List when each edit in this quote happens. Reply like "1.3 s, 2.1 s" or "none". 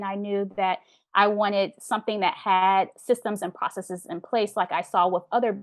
none